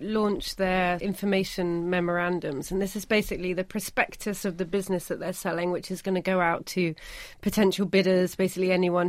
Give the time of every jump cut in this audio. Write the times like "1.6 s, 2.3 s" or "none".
1.0 s

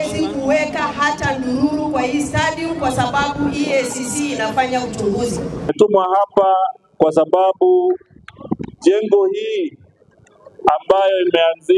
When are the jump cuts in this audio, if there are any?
5.7 s

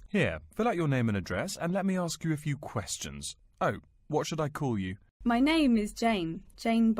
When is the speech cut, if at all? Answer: 5.0 s

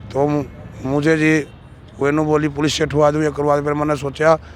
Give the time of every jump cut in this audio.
none

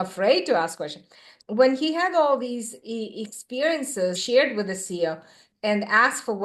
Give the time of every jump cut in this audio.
1.3 s, 4.2 s, 5.4 s

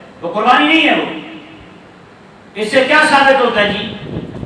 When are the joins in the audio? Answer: none

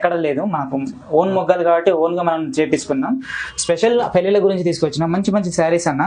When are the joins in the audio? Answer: 3.4 s

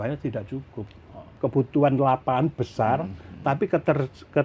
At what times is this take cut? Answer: 1.3 s

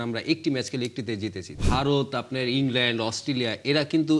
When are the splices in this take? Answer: 1.6 s

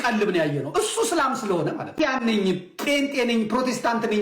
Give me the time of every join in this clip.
1.9 s

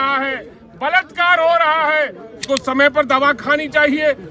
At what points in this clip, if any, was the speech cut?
2.4 s

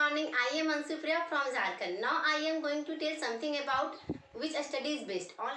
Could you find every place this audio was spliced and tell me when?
none

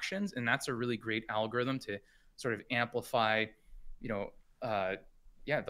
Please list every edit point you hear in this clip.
none

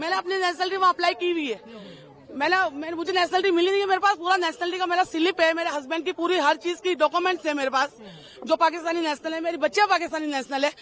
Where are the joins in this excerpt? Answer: none

